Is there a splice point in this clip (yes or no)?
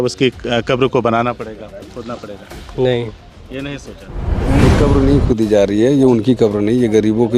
yes